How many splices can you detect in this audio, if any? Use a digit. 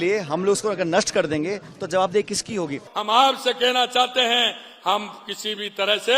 1